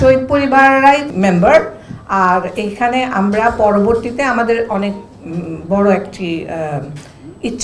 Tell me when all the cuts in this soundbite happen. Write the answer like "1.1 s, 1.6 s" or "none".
1.1 s